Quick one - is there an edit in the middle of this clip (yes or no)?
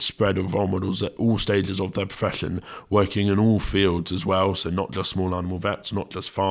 no